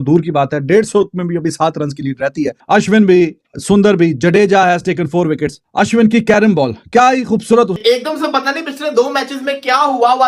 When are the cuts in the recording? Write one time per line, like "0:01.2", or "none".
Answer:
0:02.6
0:07.8